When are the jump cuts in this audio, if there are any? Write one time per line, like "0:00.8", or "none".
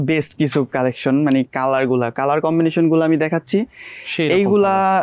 none